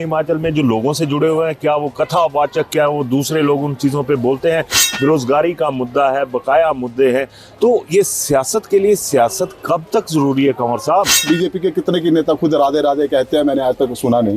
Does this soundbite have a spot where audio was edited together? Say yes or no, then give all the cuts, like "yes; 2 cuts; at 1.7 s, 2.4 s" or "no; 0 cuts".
yes; 1 cut; at 11.3 s